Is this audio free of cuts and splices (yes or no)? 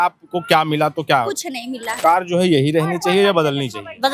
no